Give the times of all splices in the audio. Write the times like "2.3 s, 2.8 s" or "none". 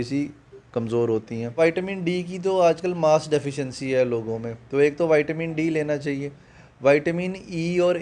1.6 s

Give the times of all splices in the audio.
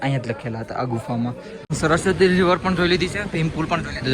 1.6 s

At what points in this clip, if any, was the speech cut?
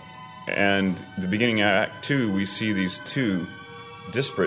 none

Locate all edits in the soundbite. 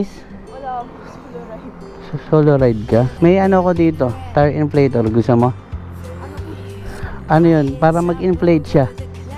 3.1 s

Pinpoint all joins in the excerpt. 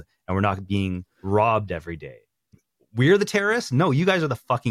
2.5 s

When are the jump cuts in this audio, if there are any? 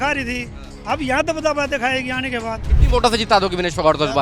2.7 s

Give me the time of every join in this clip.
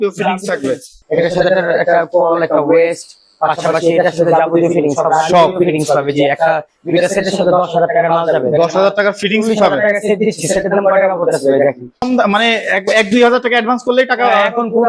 0.9 s, 12.1 s

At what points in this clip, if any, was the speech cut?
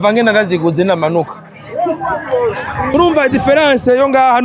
none

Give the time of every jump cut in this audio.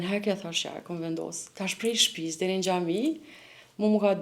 1.4 s

